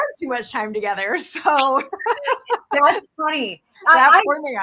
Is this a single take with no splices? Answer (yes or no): yes